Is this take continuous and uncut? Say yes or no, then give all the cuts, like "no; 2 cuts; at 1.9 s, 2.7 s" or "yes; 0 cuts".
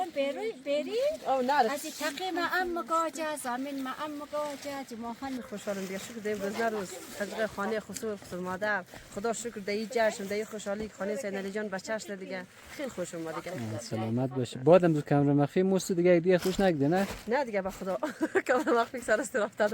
no; 1 cut; at 5.4 s